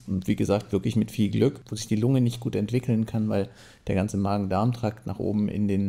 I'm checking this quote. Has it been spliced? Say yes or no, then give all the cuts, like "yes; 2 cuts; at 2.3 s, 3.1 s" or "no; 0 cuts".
yes; 1 cut; at 1.7 s